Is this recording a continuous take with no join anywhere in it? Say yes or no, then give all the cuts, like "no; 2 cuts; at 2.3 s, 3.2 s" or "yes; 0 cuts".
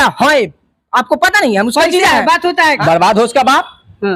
no; 1 cut; at 2.8 s